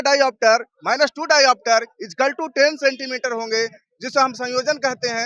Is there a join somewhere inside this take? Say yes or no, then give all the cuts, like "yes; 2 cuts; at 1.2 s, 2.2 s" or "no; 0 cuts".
no; 0 cuts